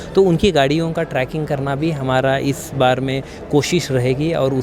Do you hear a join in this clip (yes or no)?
no